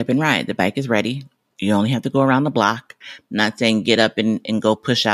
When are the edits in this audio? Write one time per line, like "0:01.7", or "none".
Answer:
0:03.0

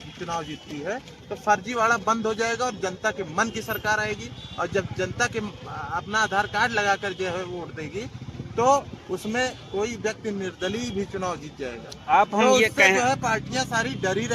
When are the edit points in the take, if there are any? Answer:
0:09.8

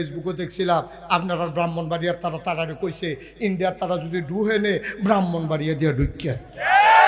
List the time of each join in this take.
none

